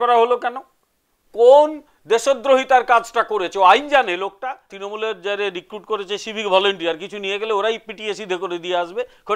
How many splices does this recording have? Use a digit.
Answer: 1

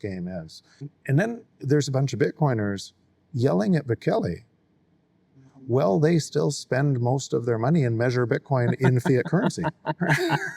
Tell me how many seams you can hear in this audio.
1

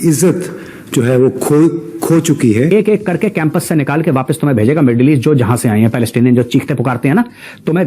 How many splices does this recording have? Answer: 1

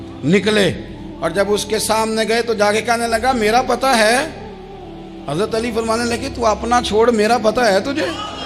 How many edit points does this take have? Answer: 0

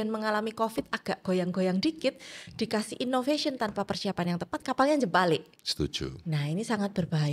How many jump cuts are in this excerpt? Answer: 1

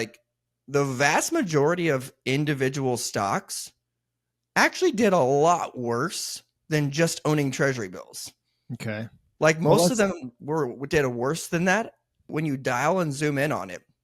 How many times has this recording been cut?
1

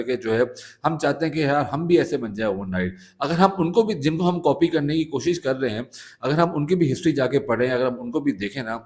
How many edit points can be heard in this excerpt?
0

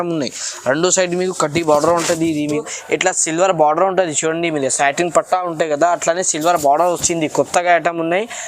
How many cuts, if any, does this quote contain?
1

